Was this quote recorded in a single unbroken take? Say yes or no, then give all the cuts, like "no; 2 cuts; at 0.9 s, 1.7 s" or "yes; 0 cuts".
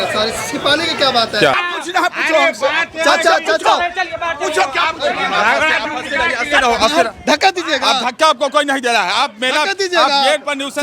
no; 1 cut; at 1.6 s